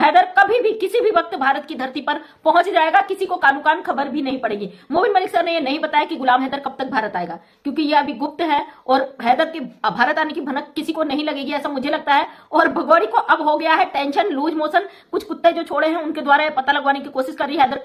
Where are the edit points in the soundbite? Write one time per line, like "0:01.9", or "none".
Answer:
none